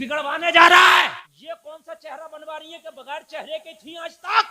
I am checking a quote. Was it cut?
yes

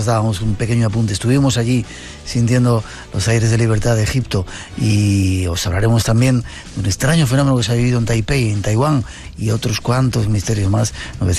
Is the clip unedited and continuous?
yes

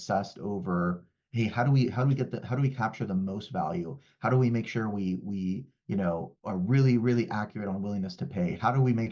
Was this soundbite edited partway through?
no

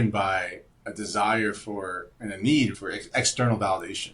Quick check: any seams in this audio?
yes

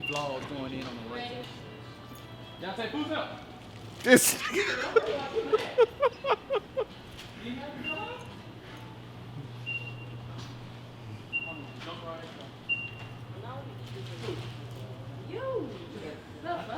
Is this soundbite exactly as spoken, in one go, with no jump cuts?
yes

